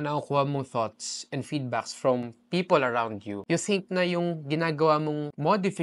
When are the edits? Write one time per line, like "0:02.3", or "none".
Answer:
none